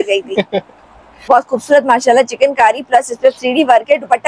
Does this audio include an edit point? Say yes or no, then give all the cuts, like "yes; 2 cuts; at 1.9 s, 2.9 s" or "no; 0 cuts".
yes; 1 cut; at 1.1 s